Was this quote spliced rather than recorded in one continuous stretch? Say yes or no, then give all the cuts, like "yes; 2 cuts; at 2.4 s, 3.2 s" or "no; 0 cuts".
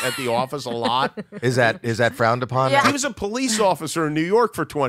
yes; 1 cut; at 2.9 s